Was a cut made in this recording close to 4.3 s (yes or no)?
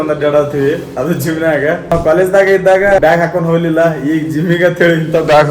no